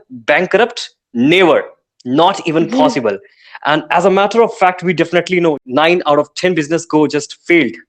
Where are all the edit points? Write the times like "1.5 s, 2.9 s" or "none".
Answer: 5.6 s